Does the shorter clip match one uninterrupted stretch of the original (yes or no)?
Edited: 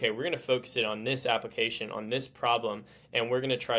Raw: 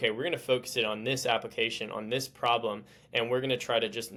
yes